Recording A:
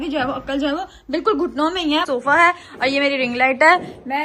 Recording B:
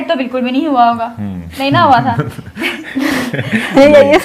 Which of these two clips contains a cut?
A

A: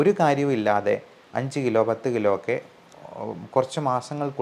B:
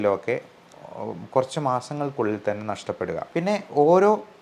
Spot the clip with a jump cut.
B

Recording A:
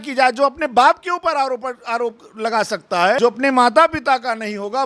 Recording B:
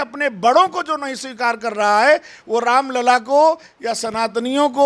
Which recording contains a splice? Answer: A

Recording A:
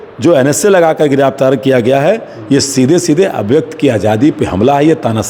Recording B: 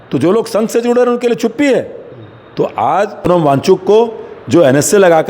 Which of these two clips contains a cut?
B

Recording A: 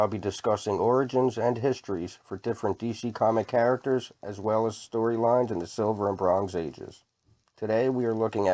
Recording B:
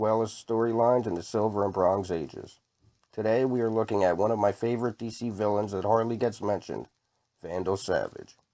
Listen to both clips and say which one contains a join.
B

